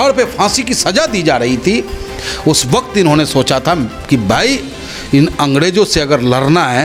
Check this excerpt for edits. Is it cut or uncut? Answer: uncut